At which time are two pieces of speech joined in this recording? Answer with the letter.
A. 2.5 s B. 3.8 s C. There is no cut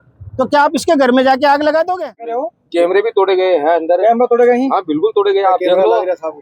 A